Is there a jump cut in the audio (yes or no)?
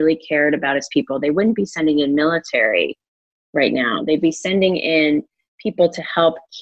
no